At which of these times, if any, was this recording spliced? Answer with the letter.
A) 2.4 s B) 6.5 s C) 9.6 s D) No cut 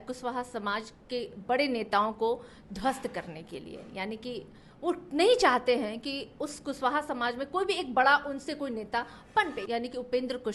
C